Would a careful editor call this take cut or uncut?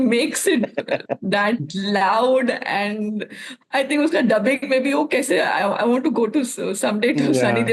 uncut